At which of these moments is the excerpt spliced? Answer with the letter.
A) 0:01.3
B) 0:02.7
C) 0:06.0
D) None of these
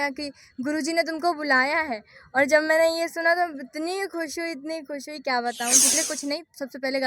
C